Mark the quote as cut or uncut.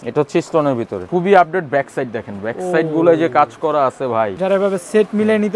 cut